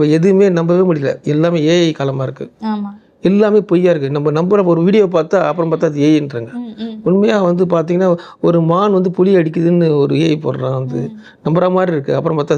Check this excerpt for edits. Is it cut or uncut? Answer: uncut